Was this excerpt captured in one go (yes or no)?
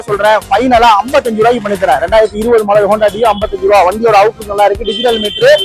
yes